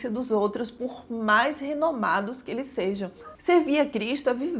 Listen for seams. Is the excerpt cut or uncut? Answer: cut